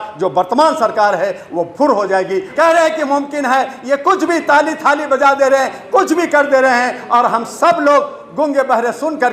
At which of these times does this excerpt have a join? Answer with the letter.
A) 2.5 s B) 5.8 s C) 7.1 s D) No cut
A